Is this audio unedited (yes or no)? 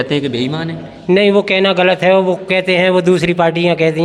yes